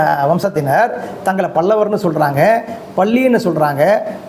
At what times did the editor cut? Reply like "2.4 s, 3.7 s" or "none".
none